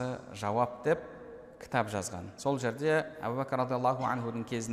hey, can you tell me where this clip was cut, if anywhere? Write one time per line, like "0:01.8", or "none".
0:03.1